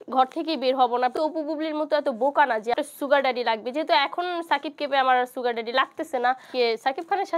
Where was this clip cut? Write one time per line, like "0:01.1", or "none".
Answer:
0:01.1
0:02.8
0:06.5